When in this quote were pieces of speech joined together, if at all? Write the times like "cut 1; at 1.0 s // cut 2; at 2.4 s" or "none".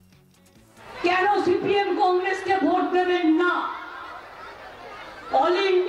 cut 1; at 1.1 s